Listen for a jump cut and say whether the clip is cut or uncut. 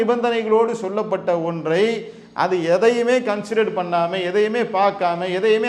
uncut